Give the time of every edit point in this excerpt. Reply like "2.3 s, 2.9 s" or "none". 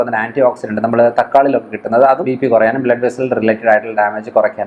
2.2 s